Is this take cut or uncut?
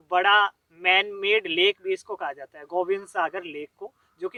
uncut